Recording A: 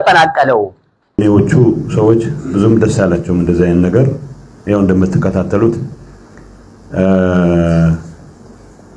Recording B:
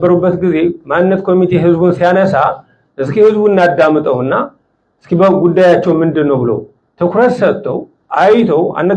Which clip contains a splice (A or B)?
A